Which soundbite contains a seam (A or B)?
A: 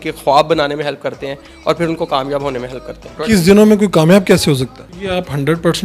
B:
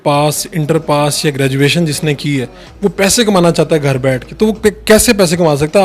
A